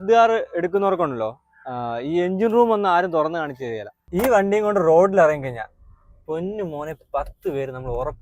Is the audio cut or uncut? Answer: cut